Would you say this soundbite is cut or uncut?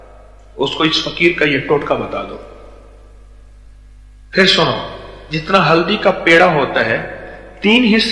uncut